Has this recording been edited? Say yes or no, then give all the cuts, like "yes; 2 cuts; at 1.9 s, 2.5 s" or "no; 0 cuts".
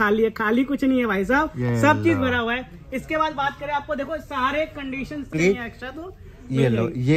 yes; 1 cut; at 5.3 s